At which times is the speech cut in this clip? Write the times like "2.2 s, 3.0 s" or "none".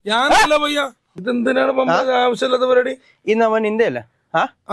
1.1 s